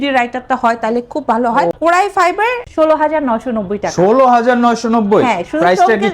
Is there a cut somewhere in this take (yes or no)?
yes